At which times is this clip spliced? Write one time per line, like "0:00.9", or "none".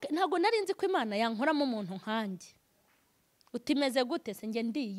none

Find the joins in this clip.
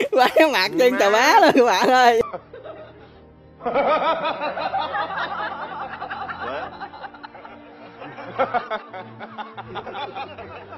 0:02.2

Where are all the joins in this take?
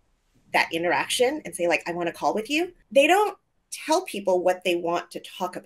0:02.8

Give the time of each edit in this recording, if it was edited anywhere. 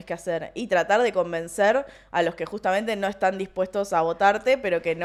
none

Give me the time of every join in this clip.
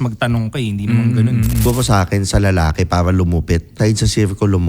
0:01.6
0:03.8

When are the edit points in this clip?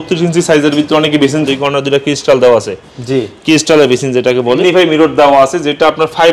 0:01.4
0:04.6

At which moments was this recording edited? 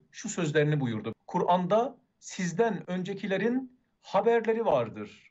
0:01.1

